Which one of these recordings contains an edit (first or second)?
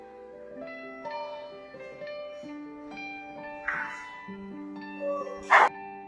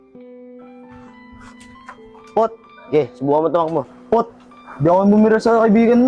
second